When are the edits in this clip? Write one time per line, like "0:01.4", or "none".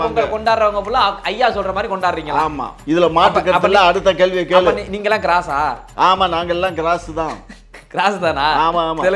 0:02.7